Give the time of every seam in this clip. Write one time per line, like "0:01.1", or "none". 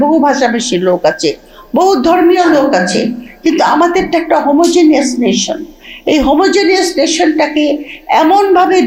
none